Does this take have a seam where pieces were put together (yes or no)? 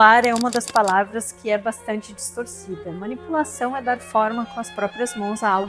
no